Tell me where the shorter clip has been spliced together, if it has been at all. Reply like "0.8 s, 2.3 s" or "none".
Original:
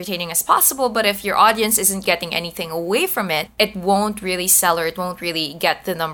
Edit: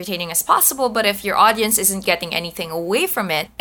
none